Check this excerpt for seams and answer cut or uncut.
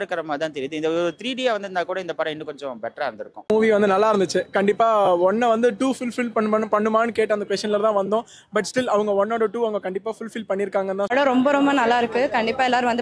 cut